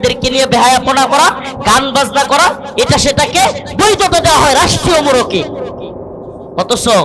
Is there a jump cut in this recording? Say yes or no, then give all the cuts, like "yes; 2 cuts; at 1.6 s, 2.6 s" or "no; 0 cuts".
no; 0 cuts